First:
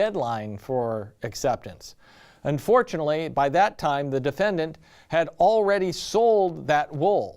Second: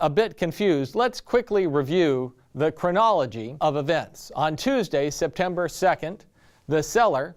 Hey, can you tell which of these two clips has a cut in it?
first; 1 cut; at 5.3 s

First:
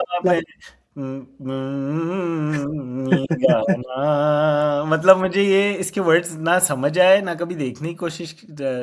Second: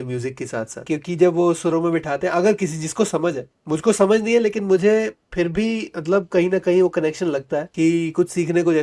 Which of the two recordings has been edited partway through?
second; 2 cuts; at 0.8 s, 7.7 s

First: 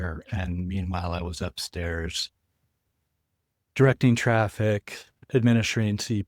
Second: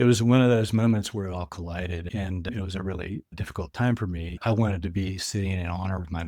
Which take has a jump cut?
second; 3 cuts; at 2.4 s, 3.4 s, 4.4 s

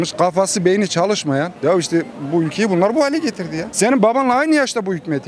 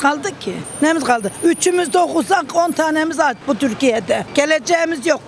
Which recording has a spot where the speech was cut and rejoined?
first; 2 cuts; at 1.5 s, 3.7 s

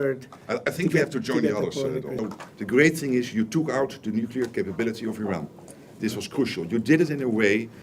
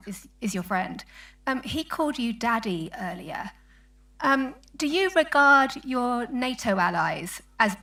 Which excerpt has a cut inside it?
first; 1 cut; at 2.2 s

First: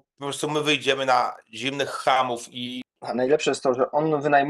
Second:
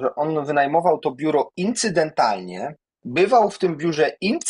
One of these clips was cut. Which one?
first; 1 cut; at 2.9 s

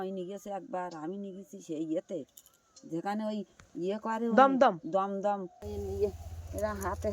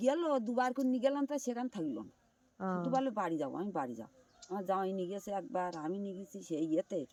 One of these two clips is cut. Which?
first; 1 cut; at 5.6 s

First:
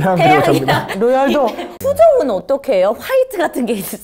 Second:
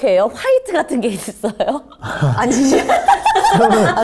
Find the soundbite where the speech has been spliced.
first; 1 cut; at 1.7 s

